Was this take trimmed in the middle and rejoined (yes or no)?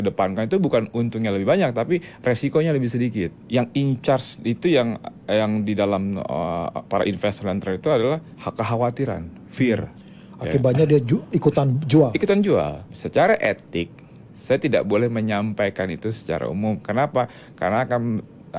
yes